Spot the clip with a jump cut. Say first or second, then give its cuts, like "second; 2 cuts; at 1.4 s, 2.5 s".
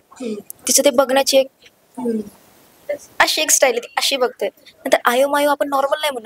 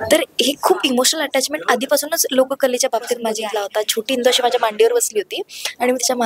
second; 1 cut; at 3.4 s